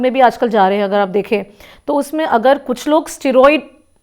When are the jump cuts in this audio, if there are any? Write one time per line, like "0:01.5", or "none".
none